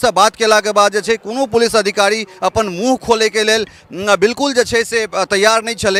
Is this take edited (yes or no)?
no